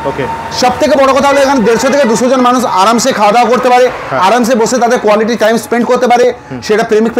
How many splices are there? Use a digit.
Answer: 0